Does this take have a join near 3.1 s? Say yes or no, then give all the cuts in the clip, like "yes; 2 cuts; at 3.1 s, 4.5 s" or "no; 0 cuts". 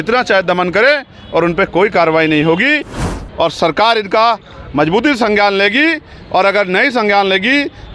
yes; 1 cut; at 3.1 s